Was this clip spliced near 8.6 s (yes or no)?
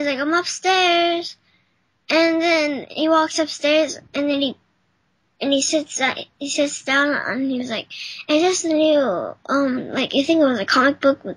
yes